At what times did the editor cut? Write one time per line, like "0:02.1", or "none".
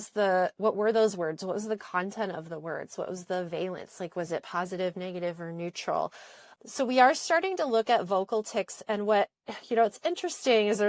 none